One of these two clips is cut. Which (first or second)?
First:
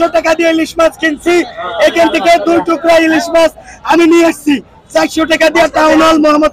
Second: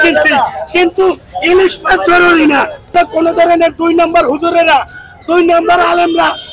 second